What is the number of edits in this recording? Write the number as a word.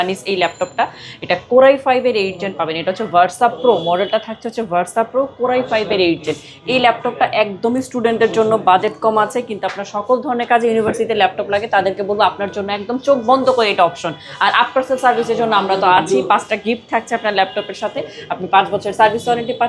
zero